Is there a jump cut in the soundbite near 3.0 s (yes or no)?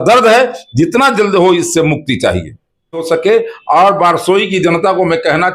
yes